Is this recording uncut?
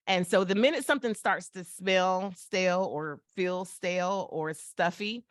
yes; 0 cuts

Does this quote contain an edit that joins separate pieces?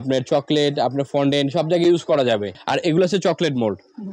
yes; 1 cut; at 2.6 s

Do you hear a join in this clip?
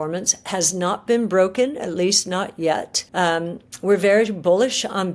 yes; 1 cut; at 3.0 s

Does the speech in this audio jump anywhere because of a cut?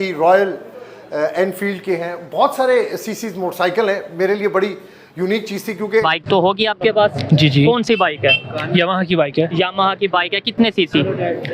yes; 1 cut; at 6.0 s

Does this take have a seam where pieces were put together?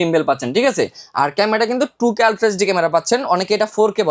no; 0 cuts

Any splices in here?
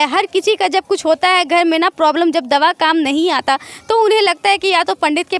no; 0 cuts

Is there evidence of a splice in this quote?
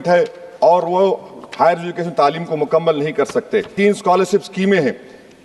yes; 1 cut; at 3.7 s

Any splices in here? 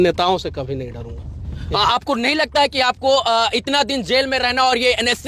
no; 0 cuts

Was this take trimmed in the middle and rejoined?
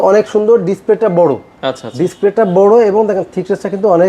no; 0 cuts

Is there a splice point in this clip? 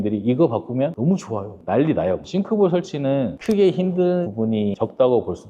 yes; 1 cut; at 2.2 s

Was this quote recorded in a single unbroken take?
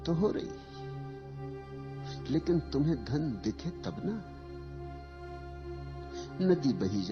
no; 2 cuts; at 4.2 s, 6.4 s

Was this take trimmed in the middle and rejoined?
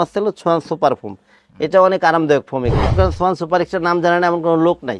yes; 1 cut; at 2.9 s

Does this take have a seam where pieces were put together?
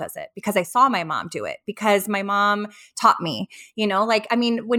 no; 0 cuts

